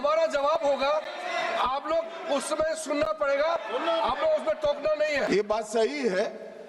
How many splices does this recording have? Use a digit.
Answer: 1